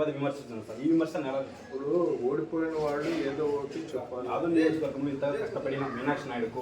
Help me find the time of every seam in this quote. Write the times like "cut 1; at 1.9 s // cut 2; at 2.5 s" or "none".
cut 1; at 1.6 s // cut 2; at 4.2 s

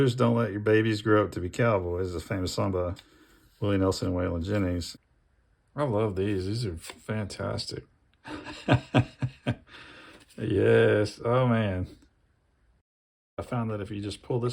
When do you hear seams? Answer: cut 1; at 4.9 s // cut 2; at 13.4 s

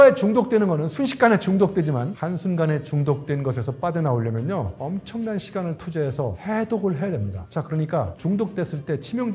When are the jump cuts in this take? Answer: none

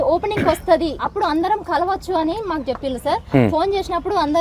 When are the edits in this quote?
cut 1; at 1.1 s

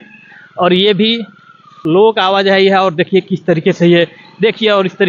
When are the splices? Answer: cut 1; at 1.8 s

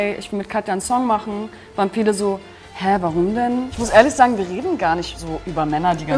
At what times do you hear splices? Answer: cut 1; at 3.8 s

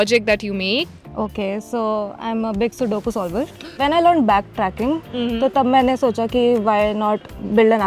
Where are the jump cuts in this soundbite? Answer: cut 1; at 1.0 s // cut 2; at 3.8 s

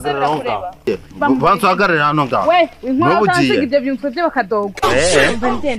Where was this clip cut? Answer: none

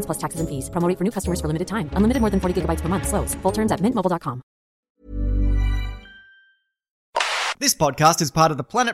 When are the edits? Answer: cut 1; at 7.4 s

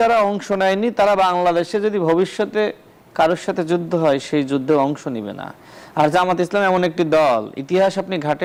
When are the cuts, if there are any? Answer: none

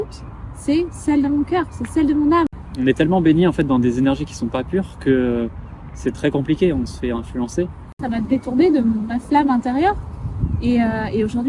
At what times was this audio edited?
cut 1; at 2.5 s // cut 2; at 8.0 s

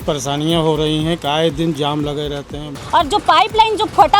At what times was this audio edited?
cut 1; at 2.7 s

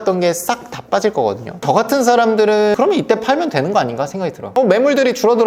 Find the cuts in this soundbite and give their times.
cut 1; at 1.5 s

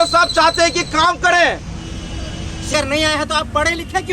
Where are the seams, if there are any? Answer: cut 1; at 2.7 s

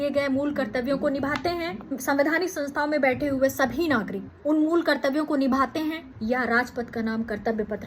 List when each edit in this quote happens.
cut 1; at 2.0 s // cut 2; at 4.2 s // cut 3; at 6.1 s

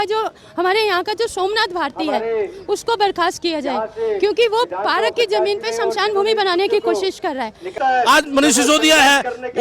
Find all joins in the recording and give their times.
cut 1; at 7.7 s

